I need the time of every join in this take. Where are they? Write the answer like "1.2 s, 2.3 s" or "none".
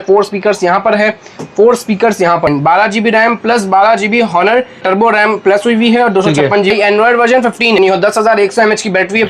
2.5 s, 4.8 s, 6.7 s, 7.8 s